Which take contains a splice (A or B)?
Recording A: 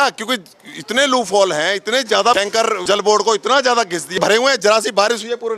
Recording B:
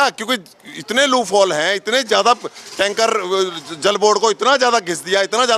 A